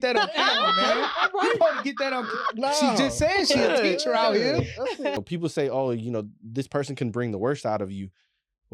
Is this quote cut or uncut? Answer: cut